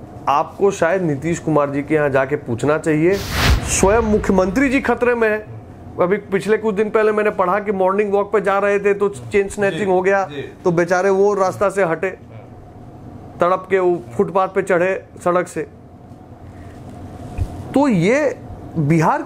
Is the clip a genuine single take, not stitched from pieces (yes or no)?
no